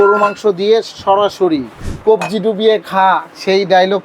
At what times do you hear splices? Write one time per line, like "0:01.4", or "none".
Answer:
0:01.8